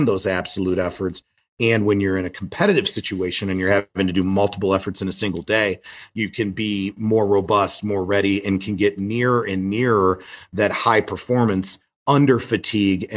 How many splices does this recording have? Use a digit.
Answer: 1